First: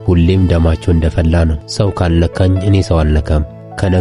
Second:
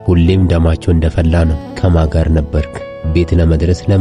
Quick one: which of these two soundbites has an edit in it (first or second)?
second